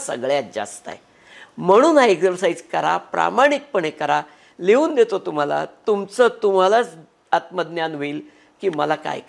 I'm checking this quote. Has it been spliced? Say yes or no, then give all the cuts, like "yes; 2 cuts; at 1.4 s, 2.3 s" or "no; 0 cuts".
no; 0 cuts